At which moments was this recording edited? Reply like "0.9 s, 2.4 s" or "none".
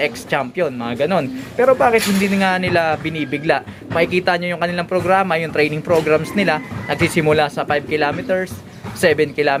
none